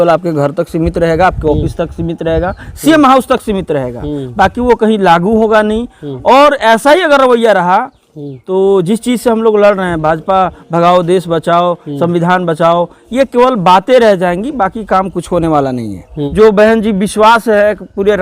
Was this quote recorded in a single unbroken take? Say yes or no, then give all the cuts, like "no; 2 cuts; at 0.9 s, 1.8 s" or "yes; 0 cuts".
no; 1 cut; at 16.2 s